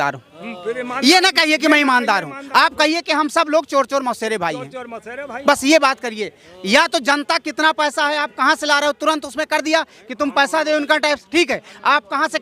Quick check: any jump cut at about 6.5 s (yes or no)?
no